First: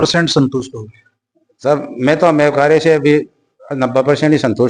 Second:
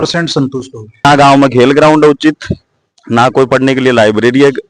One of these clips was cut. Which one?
second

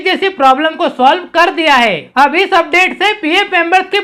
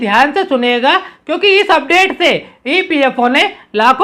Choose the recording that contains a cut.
first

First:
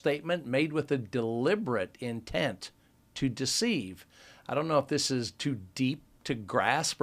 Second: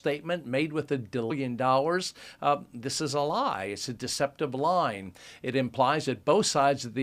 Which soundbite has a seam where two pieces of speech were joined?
first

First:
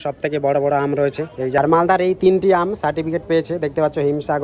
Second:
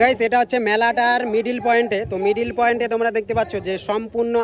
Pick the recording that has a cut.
first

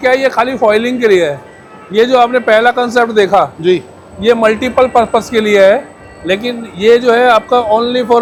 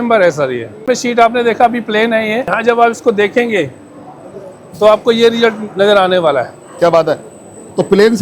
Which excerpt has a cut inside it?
second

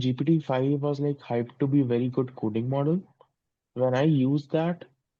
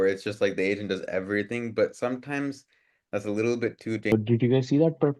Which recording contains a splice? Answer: second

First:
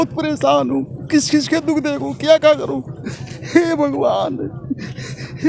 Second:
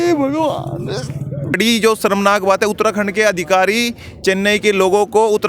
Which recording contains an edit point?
second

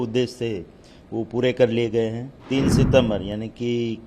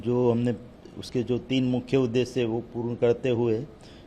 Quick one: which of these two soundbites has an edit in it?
first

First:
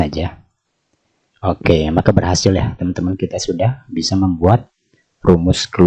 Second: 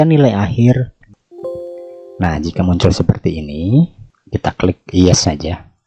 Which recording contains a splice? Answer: second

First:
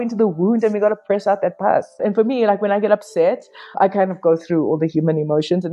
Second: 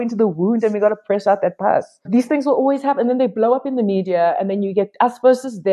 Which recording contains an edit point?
first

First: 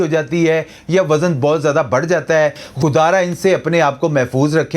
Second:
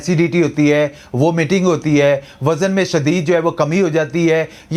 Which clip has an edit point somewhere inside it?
first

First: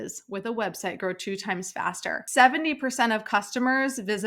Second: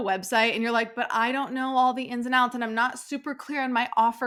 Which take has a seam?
first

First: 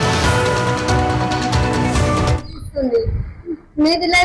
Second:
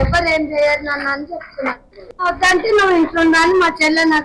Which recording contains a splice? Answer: first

